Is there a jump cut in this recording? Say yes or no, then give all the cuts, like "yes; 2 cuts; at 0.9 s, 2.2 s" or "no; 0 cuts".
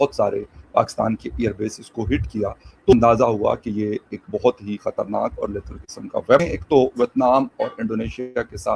no; 0 cuts